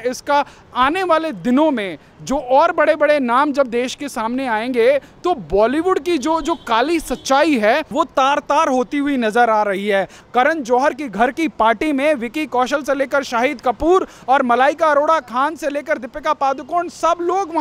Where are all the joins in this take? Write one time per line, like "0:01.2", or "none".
0:10.2